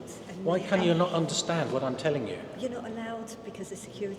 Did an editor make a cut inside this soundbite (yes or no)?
no